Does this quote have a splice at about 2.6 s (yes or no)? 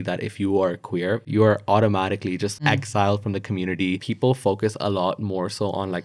yes